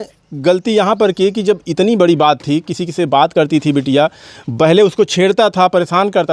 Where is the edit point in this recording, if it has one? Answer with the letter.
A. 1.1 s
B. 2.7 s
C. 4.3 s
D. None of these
D